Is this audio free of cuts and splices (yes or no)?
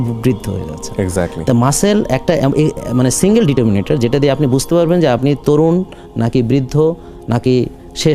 yes